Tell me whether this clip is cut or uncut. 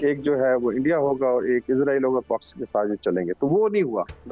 uncut